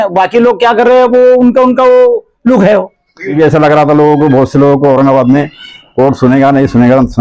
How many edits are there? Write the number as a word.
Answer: one